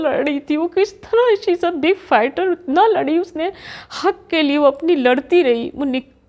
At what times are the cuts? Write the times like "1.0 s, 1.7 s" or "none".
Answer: none

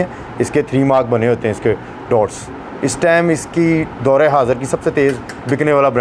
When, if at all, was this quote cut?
none

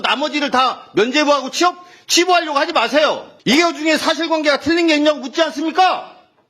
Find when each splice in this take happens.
3.3 s

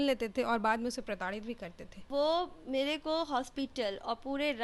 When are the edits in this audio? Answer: 2.0 s

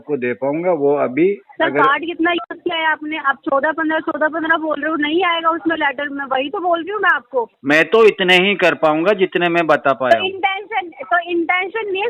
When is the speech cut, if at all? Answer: 7.5 s

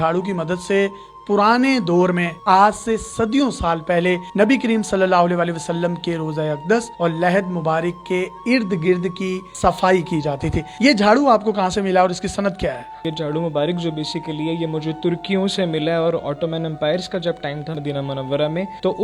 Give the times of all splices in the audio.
none

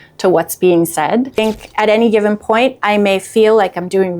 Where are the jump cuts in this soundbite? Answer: 1.4 s

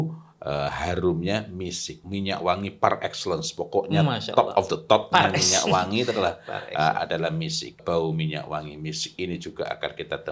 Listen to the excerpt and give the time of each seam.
2.0 s, 7.8 s

